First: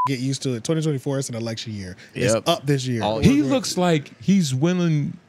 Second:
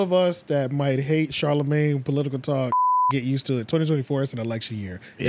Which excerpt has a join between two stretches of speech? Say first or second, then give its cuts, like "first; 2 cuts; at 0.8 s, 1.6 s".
first; 1 cut; at 3.2 s